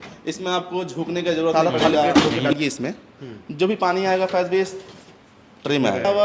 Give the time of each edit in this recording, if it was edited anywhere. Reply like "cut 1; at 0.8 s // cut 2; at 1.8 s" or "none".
cut 1; at 2.4 s